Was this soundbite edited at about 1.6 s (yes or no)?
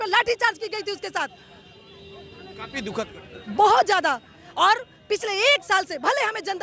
no